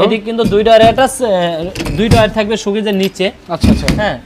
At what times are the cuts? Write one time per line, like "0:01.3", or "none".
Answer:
none